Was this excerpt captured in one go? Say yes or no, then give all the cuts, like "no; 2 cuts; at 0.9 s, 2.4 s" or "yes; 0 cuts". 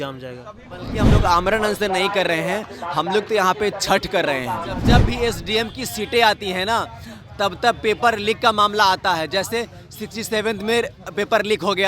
no; 2 cuts; at 1.0 s, 4.8 s